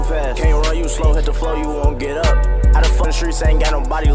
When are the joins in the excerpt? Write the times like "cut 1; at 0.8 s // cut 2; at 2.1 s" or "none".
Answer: cut 1; at 3.0 s

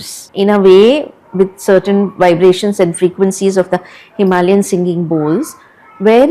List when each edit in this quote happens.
none

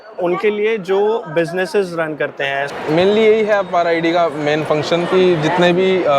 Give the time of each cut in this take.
cut 1; at 2.7 s

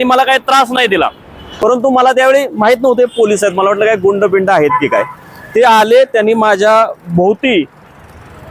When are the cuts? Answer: cut 1; at 1.4 s

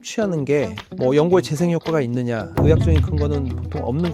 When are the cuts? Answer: cut 1; at 2.5 s

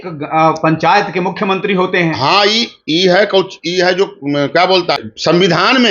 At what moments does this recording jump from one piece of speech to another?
cut 1; at 5.0 s

